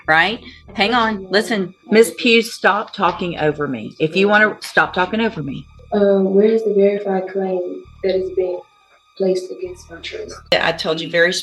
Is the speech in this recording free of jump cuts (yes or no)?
no